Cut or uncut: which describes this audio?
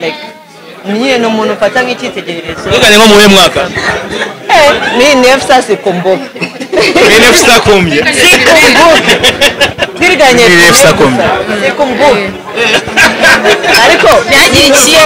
uncut